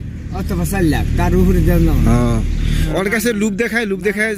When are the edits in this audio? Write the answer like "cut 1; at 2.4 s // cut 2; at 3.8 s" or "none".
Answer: cut 1; at 2.8 s